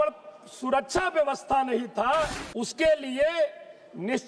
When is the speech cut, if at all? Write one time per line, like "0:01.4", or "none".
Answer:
0:02.4